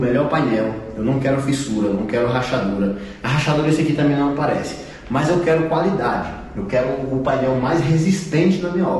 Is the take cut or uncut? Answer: uncut